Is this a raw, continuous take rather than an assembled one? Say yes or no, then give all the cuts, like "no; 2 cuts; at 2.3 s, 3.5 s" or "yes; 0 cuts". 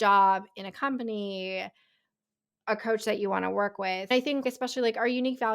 no; 1 cut; at 4.2 s